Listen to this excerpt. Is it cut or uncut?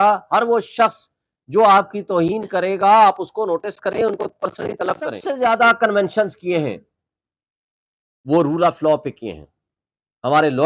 cut